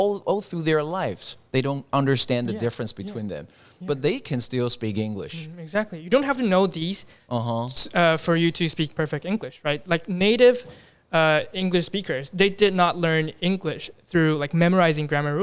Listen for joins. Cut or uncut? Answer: uncut